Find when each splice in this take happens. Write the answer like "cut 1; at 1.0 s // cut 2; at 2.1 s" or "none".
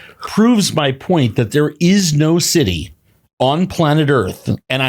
none